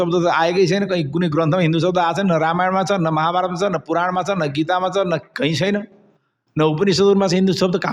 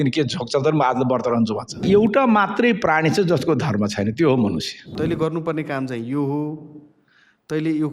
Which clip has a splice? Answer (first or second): second